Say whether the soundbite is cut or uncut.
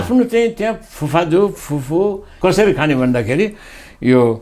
cut